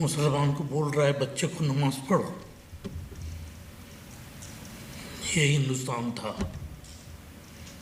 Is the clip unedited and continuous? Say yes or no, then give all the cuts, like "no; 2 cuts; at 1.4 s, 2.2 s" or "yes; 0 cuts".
yes; 0 cuts